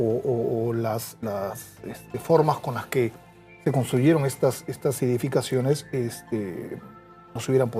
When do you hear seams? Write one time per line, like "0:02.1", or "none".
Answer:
0:02.5